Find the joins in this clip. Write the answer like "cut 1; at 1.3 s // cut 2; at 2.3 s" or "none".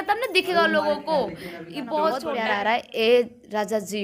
cut 1; at 2.3 s